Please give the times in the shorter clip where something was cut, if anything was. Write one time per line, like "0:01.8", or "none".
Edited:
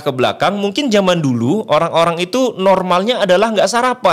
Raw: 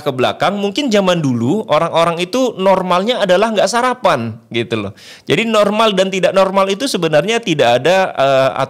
none

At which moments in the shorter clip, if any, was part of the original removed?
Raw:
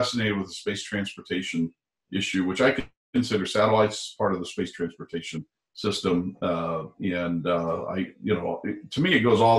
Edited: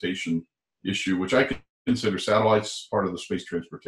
none

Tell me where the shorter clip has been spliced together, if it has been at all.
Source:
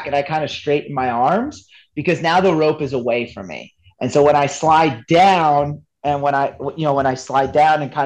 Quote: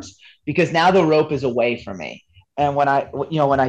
0:02.4

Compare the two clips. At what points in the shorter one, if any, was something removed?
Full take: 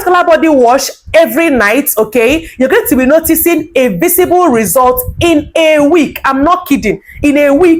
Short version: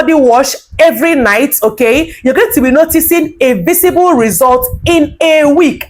none

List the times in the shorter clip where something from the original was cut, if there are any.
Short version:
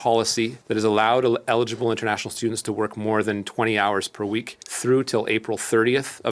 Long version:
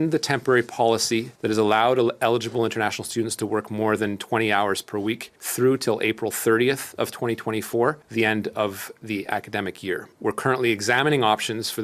none

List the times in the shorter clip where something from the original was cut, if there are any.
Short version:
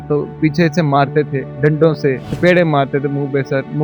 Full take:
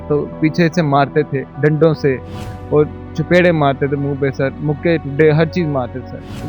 0:02.3

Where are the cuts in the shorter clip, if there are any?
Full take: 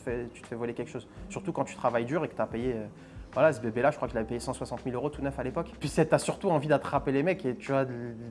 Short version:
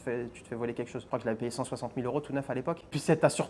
0:01.1

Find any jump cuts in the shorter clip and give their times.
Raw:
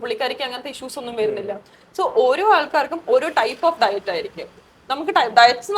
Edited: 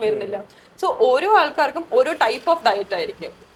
none

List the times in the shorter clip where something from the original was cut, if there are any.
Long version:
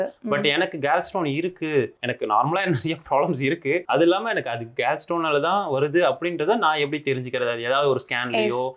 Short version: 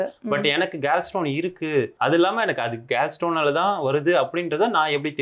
0:02.0

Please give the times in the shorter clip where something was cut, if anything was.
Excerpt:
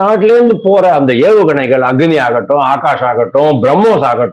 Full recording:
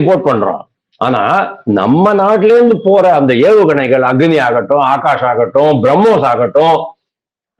none

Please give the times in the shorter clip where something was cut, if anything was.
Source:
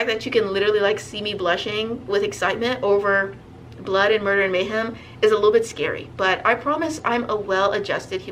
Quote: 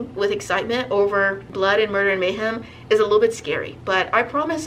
0:01.4

